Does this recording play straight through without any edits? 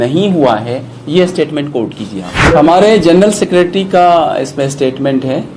no; 1 cut; at 2.3 s

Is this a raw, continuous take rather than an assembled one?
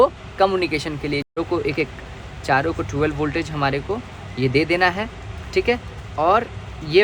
no; 1 cut; at 1.4 s

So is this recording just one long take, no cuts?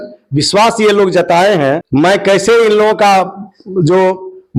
yes; 0 cuts

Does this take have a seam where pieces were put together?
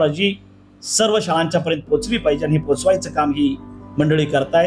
no; 0 cuts

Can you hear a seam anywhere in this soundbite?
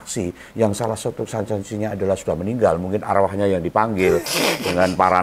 no; 0 cuts

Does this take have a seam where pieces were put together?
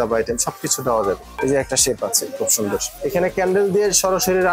yes; 2 cuts; at 1.4 s, 2.9 s

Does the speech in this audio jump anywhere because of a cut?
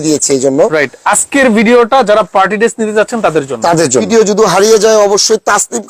yes; 1 cut; at 4.1 s

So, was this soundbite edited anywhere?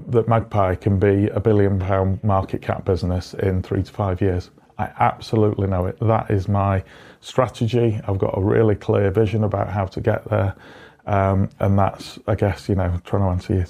no; 0 cuts

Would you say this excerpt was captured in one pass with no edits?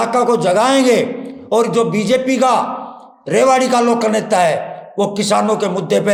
yes; 0 cuts

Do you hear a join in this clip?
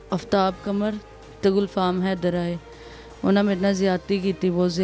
no; 0 cuts

